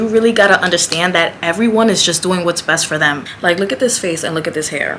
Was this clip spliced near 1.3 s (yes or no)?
no